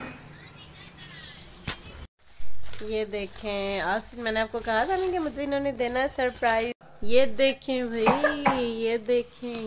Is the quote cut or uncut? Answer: cut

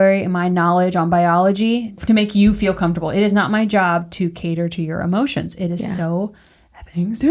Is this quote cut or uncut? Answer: cut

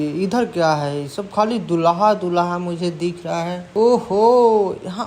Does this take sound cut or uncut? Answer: cut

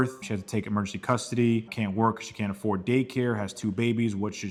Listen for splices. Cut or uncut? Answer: uncut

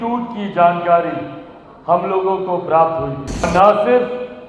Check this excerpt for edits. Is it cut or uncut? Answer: cut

